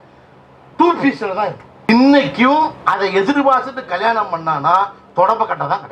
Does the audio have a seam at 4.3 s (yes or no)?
no